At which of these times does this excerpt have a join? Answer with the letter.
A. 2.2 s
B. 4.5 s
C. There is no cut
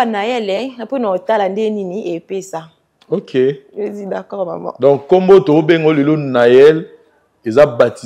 C